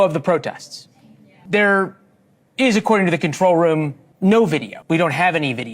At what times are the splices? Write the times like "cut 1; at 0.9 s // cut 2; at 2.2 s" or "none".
cut 1; at 1.3 s // cut 2; at 4.0 s // cut 3; at 4.7 s